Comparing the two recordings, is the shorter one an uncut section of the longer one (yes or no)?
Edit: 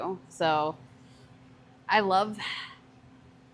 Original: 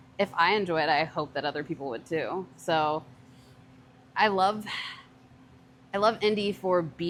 yes